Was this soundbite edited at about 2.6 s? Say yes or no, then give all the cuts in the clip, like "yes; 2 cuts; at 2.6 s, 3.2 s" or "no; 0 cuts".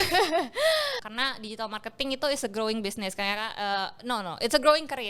no; 1 cut; at 1.0 s